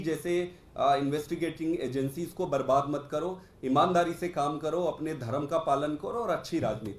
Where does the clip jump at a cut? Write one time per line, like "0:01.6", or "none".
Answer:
none